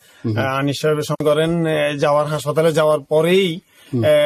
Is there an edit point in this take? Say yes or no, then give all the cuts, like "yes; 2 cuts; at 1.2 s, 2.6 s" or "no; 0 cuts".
yes; 1 cut; at 1.2 s